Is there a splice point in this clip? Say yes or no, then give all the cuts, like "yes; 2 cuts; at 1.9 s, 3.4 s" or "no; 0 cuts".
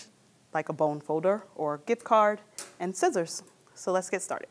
no; 0 cuts